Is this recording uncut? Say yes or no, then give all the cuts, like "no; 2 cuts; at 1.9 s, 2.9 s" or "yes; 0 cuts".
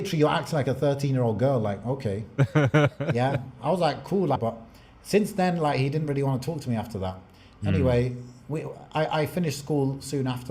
no; 1 cut; at 4.4 s